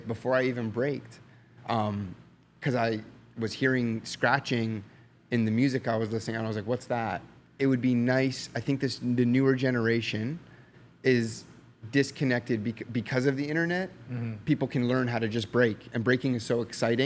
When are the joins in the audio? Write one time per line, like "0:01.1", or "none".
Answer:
0:07.5

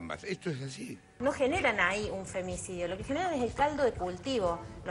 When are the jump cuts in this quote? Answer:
0:01.2

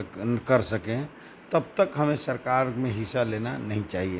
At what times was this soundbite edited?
none

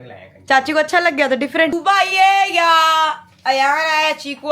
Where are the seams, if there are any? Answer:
0:01.7

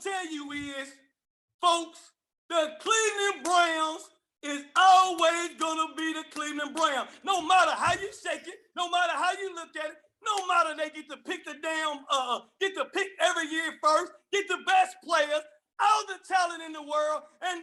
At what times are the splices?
none

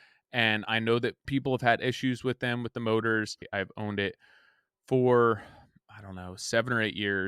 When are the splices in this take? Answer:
0:01.2
0:03.5

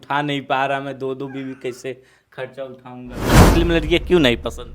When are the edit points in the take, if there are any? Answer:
0:03.4

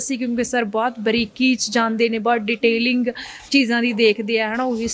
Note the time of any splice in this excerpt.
none

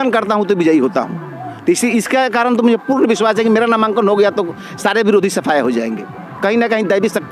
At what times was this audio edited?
none

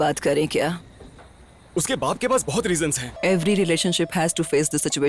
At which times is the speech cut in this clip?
0:03.1

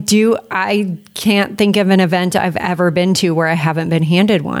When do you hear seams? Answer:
none

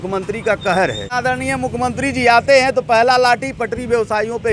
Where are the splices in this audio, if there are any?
0:01.2

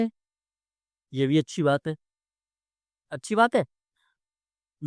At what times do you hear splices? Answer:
none

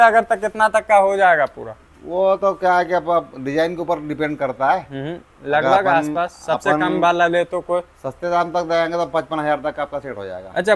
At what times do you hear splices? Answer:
none

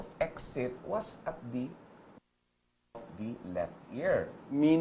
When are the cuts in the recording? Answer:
0:01.4

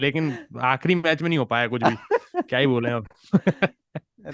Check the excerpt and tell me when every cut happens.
none

